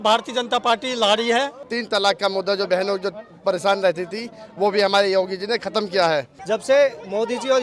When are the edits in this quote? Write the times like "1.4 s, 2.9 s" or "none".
1.7 s, 6.3 s

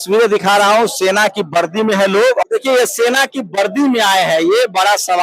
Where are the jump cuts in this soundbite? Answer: 2.4 s

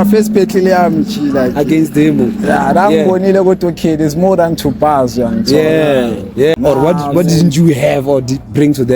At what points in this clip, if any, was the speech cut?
6.5 s

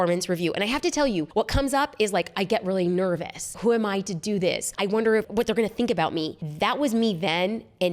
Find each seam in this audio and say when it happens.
1.3 s, 3.5 s, 5.1 s

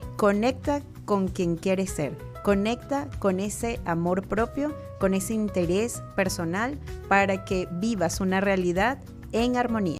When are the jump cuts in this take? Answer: none

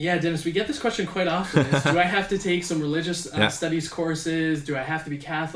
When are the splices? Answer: none

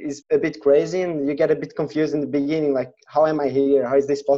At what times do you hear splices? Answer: none

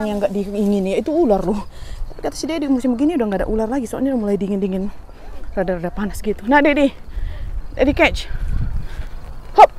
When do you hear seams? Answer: none

